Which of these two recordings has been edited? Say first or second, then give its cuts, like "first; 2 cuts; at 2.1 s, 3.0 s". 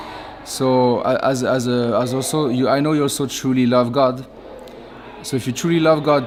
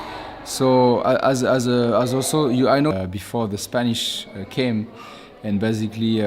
second; 1 cut; at 2.9 s